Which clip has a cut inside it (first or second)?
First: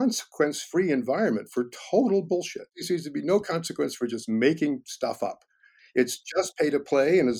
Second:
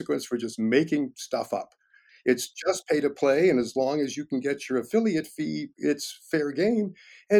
first